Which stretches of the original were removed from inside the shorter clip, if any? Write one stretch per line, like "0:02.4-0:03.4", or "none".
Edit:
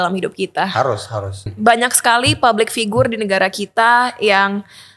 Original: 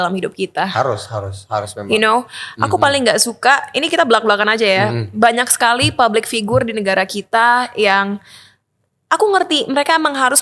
0:01.4-0:05.0